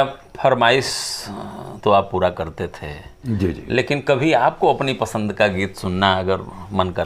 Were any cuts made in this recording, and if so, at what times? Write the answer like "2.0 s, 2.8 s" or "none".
none